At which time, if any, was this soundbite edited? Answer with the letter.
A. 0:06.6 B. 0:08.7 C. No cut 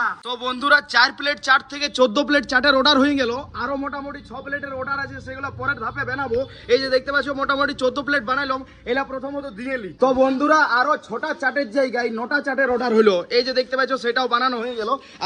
C